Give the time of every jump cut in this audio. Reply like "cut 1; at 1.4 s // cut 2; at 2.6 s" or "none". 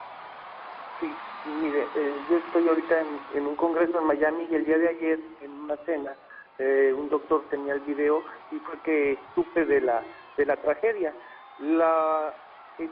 cut 1; at 10.6 s